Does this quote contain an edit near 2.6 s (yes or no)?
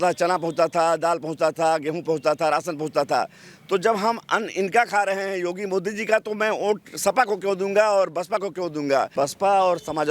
no